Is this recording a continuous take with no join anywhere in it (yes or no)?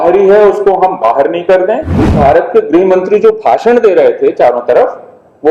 no